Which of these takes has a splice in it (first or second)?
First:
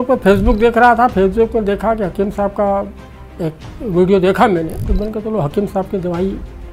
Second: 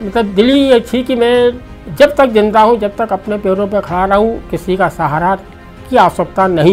first